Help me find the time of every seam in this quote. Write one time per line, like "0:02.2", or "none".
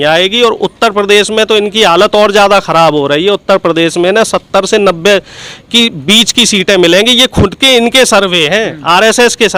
none